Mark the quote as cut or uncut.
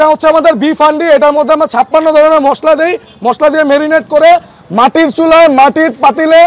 uncut